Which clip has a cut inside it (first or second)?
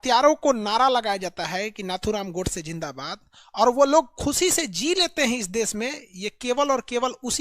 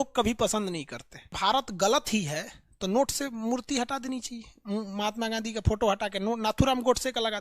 second